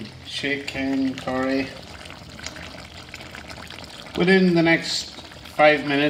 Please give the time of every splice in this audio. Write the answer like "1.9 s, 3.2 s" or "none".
none